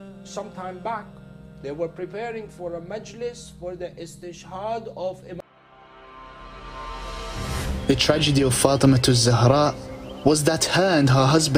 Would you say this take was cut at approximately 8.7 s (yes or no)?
no